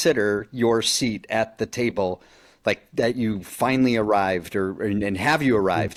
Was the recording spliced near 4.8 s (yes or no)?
no